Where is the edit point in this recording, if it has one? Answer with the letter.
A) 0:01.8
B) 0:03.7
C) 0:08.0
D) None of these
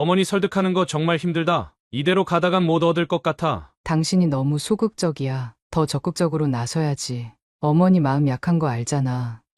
B